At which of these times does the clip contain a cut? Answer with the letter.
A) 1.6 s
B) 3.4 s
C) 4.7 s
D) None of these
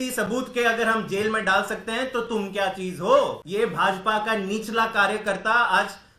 B